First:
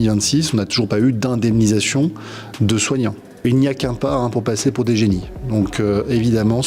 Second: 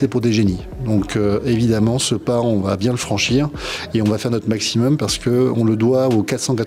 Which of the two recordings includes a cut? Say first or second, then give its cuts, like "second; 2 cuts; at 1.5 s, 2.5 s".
first; 1 cut; at 3.4 s